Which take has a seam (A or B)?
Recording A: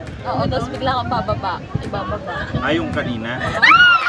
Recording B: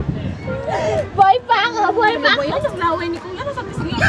B